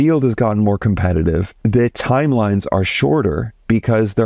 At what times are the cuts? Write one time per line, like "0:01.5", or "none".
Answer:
0:01.5